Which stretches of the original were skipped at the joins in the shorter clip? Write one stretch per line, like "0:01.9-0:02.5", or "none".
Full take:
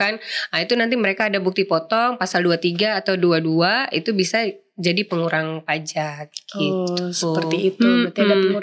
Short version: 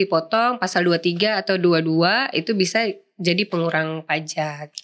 none